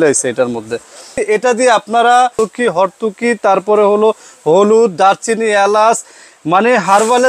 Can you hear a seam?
yes; 2 cuts; at 1.2 s, 2.3 s

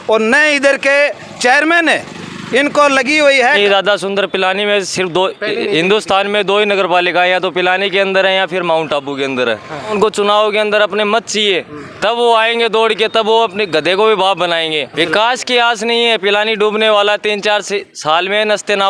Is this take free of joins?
no; 3 cuts; at 3.6 s, 9.9 s, 14.9 s

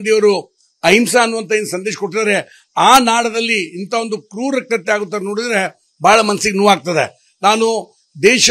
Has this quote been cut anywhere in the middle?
no; 0 cuts

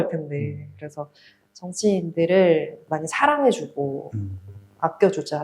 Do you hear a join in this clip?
yes; 1 cut; at 2.8 s

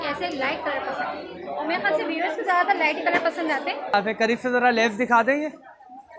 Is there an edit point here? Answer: yes; 1 cut; at 3.9 s

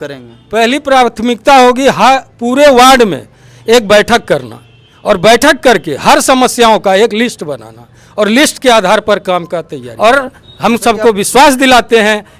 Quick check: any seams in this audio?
yes; 1 cut; at 9.8 s

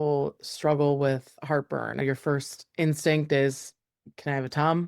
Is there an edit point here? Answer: yes; 1 cut; at 2.0 s

